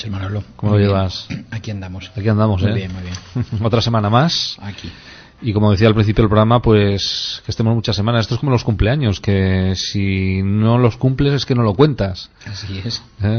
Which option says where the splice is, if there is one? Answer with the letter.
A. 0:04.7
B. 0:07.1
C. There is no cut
C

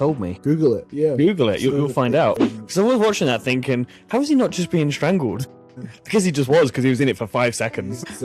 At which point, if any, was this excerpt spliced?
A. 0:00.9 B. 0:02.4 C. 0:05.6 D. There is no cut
B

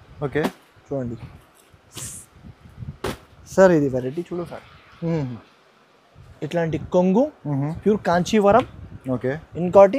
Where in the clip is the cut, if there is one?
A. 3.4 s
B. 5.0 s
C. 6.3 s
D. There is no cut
C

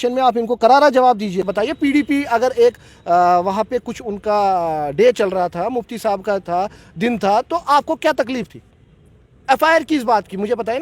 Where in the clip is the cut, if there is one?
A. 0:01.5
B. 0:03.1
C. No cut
A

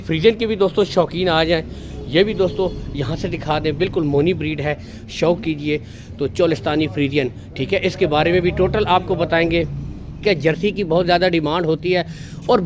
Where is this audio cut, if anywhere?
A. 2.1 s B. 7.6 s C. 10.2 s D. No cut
C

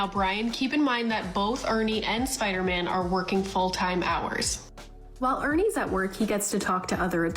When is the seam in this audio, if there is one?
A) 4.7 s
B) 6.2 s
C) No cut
A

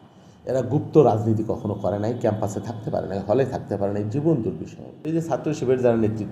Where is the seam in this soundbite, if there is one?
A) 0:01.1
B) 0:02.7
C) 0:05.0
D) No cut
C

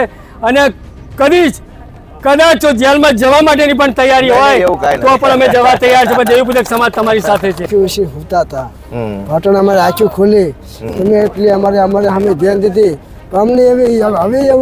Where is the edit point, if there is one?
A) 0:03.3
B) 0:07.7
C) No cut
B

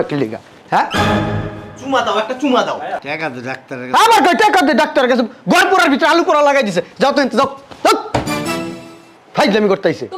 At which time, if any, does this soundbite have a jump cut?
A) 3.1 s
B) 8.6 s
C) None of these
A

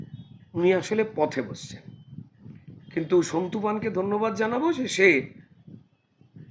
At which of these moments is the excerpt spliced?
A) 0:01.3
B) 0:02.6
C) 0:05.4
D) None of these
B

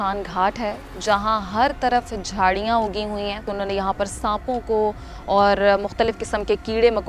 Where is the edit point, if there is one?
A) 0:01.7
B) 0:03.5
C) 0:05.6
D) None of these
B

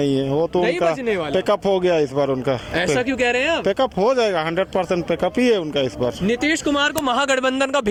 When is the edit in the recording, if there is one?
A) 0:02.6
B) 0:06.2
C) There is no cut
C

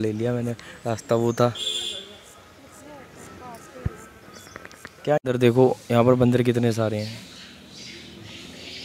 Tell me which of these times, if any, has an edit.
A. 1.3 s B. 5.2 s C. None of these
B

